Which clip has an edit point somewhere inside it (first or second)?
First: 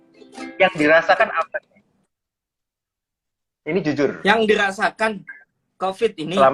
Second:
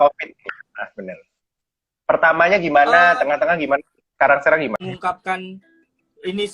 second